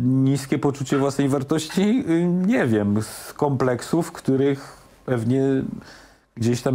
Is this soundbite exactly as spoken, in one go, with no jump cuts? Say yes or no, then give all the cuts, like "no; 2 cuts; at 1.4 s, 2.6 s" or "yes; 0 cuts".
yes; 0 cuts